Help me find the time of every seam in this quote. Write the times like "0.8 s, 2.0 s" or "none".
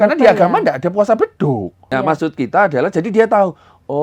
1.9 s